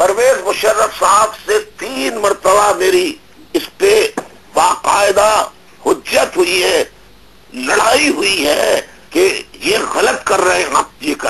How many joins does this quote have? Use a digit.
1